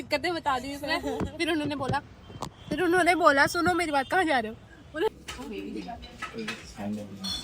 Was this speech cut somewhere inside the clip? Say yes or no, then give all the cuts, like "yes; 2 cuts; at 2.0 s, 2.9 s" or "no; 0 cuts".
yes; 1 cut; at 5.1 s